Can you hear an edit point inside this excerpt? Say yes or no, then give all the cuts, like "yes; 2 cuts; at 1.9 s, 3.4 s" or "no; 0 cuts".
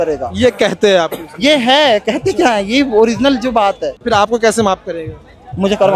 yes; 1 cut; at 3.9 s